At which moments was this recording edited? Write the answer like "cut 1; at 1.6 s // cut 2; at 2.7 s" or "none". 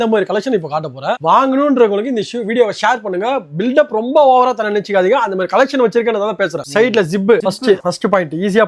none